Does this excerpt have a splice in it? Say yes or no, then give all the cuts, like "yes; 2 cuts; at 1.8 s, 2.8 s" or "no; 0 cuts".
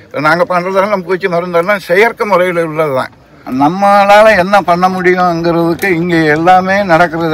yes; 1 cut; at 3.5 s